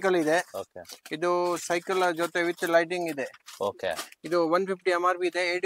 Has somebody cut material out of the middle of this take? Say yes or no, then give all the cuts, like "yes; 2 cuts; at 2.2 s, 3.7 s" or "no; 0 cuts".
no; 0 cuts